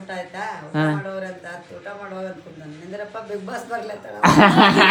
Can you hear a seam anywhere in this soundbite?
no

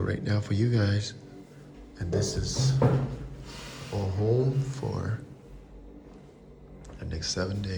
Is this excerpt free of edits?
yes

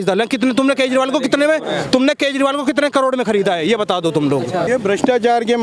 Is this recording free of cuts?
no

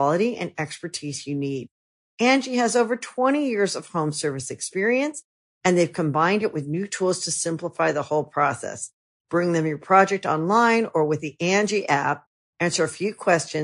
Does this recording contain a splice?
no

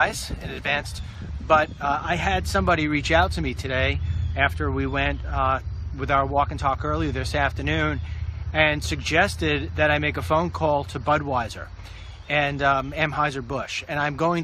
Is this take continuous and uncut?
no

